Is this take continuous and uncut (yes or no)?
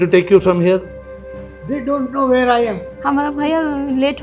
no